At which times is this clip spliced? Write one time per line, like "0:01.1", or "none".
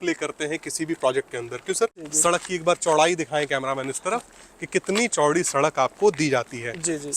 0:02.0